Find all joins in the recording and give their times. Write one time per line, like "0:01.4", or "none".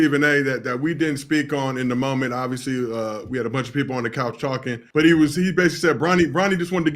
none